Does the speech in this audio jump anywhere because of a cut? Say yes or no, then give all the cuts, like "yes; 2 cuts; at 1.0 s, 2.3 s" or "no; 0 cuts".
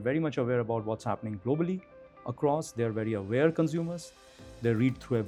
no; 0 cuts